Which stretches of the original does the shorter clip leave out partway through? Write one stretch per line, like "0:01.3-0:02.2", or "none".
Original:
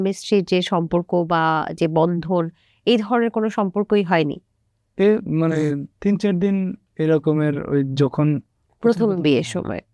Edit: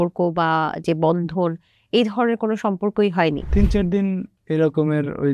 0:04.4-0:05.9